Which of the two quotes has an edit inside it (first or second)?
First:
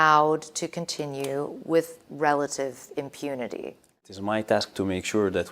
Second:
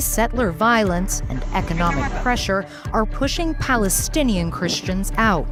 first